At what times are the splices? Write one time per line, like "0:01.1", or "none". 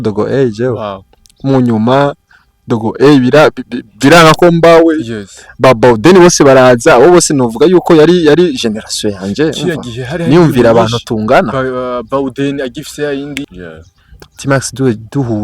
0:13.5